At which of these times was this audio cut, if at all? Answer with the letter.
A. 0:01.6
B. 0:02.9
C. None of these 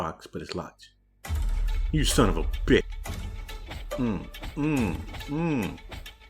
B